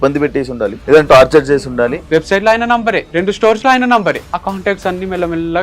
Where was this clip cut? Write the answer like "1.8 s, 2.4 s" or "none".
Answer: 0.8 s, 2.0 s, 3.1 s, 4.3 s